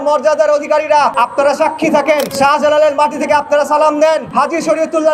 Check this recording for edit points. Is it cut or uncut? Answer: cut